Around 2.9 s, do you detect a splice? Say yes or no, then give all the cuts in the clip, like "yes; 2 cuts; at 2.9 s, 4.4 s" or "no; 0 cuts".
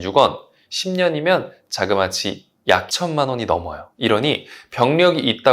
yes; 1 cut; at 2.9 s